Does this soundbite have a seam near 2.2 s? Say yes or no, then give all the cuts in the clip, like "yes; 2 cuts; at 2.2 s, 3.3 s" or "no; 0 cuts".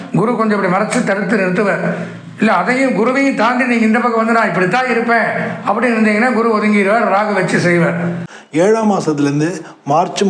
no; 1 cut; at 8.3 s